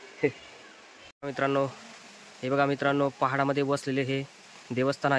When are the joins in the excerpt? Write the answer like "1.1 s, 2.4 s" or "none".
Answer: 1.1 s